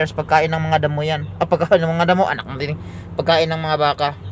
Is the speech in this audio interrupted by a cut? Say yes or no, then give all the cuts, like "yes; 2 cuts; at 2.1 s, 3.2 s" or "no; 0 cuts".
no; 0 cuts